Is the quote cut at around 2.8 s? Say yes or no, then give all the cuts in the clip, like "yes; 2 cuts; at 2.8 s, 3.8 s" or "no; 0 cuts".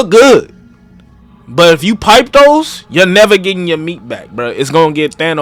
no; 0 cuts